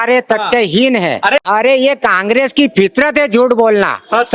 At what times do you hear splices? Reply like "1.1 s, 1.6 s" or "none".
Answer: 1.4 s